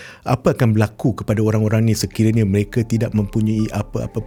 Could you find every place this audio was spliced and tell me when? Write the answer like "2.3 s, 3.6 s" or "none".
none